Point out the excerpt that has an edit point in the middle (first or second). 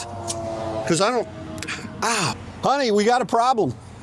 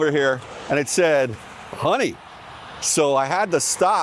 first